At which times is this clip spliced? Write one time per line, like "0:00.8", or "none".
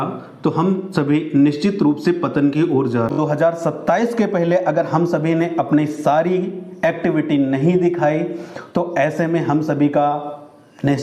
0:03.1